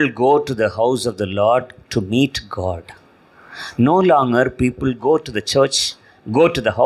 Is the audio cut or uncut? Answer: uncut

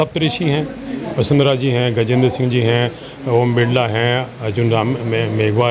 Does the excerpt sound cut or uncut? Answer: uncut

